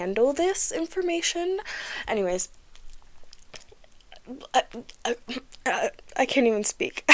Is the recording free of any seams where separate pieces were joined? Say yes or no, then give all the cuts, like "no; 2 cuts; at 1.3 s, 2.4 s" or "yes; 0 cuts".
yes; 0 cuts